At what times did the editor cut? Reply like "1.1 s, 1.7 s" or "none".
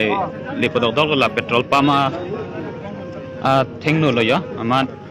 none